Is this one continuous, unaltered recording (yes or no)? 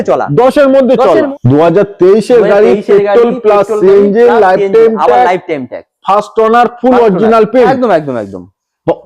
no